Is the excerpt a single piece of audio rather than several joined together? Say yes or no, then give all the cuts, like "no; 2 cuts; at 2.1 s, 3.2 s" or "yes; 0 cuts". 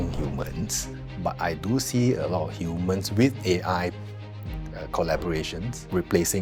yes; 0 cuts